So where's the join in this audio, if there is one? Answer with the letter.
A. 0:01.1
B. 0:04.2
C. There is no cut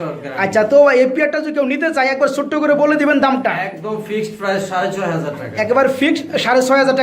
C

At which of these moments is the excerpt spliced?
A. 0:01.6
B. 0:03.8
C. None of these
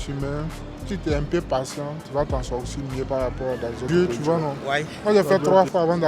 B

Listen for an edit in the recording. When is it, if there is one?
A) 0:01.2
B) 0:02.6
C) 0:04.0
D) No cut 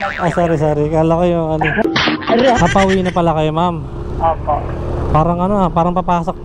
B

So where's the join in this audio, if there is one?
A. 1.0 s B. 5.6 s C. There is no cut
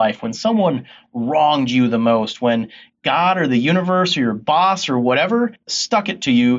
B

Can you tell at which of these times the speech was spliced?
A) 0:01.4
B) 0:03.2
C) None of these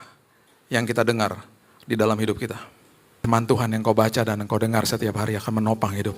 B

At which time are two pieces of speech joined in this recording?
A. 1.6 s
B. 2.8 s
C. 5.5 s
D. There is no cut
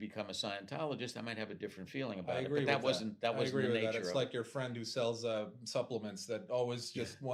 D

